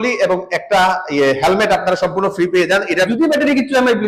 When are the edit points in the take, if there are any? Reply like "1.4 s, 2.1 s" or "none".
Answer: 3.0 s